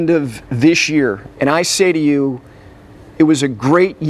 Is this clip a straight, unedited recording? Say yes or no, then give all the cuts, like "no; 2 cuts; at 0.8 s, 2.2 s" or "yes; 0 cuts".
no; 1 cut; at 1.3 s